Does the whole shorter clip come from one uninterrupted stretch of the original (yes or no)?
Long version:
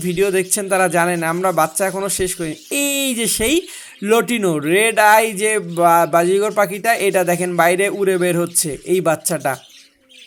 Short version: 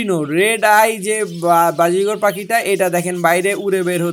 yes